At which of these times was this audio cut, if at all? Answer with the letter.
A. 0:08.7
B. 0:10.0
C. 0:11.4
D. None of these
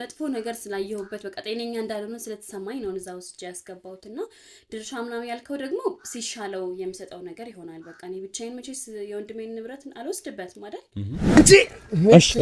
C